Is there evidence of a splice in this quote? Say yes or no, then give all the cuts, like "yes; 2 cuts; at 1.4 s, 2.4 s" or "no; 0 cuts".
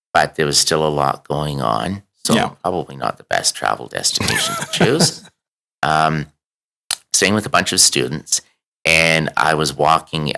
no; 0 cuts